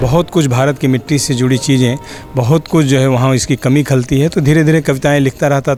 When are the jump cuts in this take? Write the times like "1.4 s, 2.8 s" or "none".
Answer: none